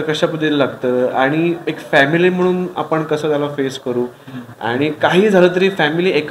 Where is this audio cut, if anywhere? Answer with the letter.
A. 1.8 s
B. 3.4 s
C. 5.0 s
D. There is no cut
D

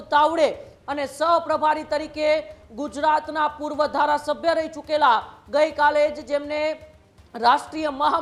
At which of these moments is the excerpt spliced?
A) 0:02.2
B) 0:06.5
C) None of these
C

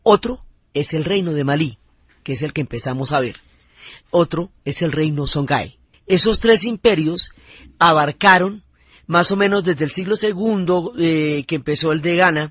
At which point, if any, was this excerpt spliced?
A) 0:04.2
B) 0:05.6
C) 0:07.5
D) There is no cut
B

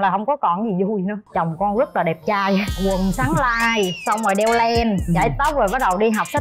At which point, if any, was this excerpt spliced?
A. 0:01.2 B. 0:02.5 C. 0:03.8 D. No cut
A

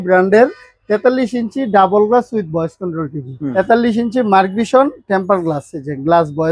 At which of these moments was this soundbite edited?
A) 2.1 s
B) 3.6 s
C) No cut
B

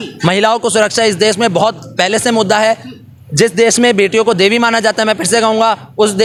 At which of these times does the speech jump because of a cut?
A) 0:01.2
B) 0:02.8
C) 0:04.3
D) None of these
D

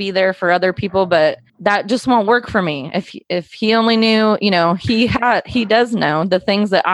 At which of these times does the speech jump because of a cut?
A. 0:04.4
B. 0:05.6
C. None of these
C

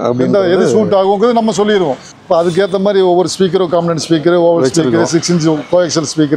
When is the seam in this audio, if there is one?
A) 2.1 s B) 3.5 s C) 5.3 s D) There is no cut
A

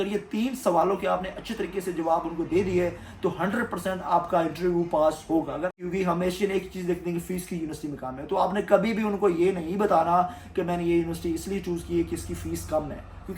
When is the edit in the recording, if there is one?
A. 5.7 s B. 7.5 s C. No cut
A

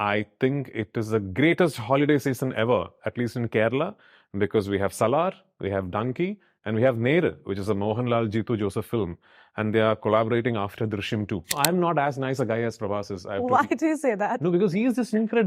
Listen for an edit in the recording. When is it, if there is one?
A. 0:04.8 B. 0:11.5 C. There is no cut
B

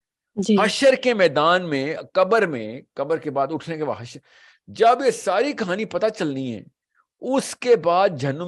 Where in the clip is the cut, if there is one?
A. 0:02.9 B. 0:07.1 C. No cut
C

